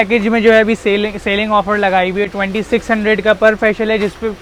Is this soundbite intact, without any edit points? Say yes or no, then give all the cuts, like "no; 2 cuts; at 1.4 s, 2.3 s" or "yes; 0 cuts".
yes; 0 cuts